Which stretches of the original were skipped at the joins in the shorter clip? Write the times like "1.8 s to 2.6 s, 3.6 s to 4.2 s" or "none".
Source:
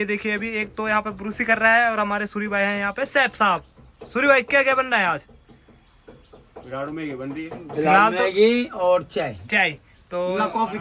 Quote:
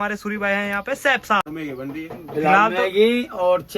3.5 s to 6.8 s